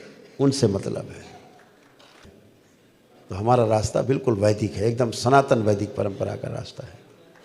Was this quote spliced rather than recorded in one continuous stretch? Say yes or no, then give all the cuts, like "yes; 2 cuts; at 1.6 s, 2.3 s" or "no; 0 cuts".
yes; 1 cut; at 2.2 s